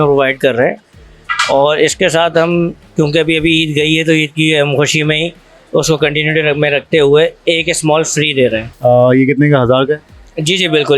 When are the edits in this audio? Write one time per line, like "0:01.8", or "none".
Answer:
0:08.7